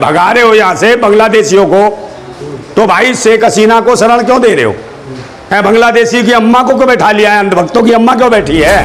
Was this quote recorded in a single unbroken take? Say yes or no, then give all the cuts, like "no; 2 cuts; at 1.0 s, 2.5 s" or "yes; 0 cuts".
yes; 0 cuts